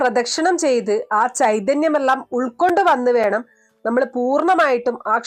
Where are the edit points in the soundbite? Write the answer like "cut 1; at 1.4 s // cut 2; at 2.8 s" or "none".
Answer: none